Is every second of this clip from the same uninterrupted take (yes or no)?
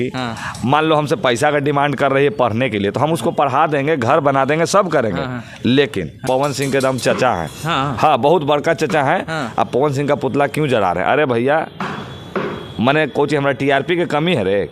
no